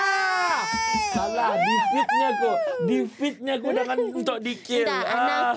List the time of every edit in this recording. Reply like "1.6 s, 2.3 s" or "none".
none